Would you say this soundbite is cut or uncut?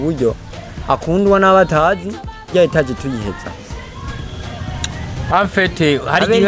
cut